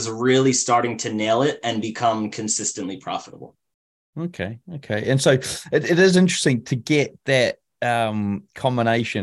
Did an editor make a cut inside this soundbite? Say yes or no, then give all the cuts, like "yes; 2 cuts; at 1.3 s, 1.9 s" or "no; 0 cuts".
no; 0 cuts